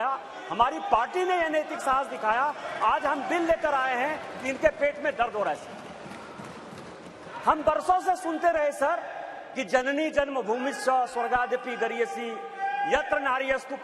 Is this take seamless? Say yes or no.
yes